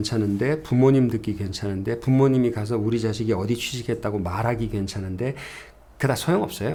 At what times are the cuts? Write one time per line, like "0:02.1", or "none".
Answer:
none

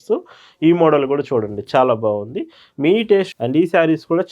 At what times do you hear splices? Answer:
0:03.3

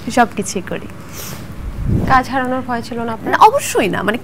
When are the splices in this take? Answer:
0:01.9

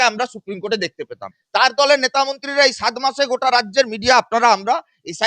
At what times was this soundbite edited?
0:01.3

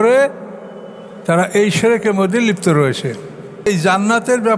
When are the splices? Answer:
0:03.7

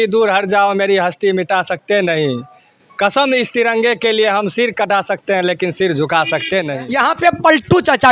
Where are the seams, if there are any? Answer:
0:06.8

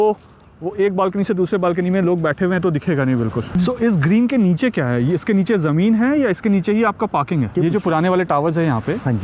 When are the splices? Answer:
0:03.6
0:07.5

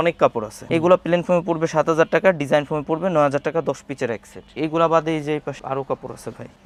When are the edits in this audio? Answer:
none

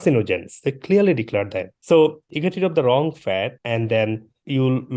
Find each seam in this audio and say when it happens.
0:01.7

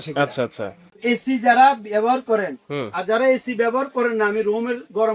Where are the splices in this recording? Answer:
0:01.0

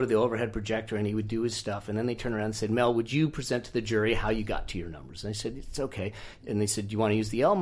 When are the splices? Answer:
none

